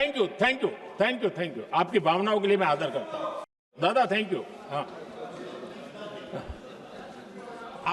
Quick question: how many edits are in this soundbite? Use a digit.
1